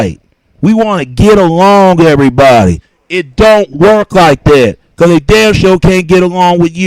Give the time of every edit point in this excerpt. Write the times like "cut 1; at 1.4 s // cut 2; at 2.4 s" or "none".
cut 1; at 3.8 s